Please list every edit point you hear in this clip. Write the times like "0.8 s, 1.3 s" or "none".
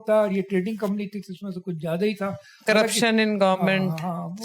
none

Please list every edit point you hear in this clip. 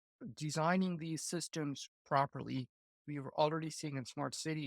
3.0 s

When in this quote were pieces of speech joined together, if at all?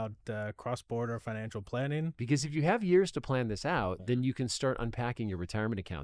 2.2 s

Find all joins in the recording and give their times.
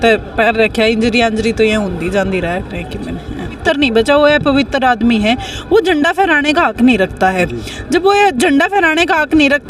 3.6 s

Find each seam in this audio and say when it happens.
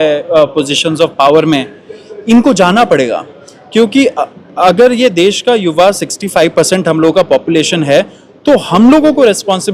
none

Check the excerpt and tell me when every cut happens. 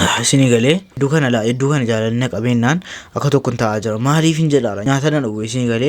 1.0 s, 4.8 s

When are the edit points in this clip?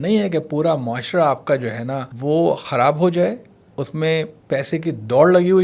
2.1 s

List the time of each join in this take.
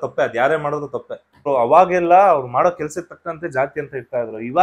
1.5 s

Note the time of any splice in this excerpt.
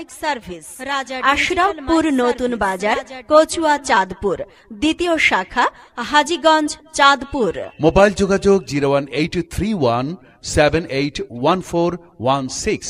0.9 s

